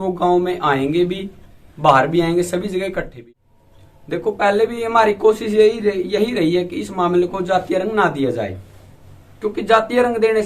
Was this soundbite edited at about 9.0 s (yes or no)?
no